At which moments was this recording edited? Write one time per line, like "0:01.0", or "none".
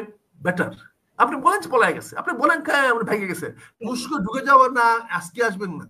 0:03.8